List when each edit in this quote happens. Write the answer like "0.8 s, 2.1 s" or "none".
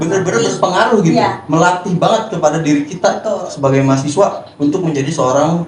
none